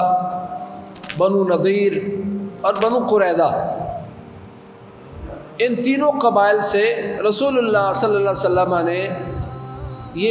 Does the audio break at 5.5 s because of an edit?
no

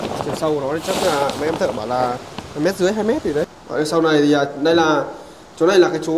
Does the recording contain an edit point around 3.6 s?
yes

